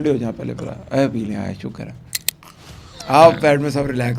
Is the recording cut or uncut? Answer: uncut